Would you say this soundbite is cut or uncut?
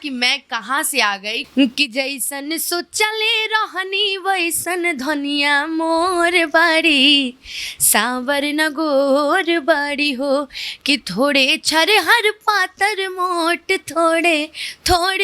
cut